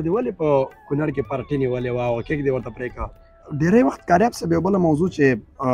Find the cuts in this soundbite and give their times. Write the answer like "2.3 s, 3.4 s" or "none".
3.4 s